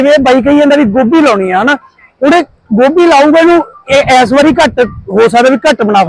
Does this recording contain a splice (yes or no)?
no